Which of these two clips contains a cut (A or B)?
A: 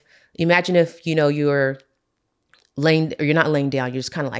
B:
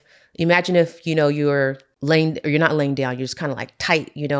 B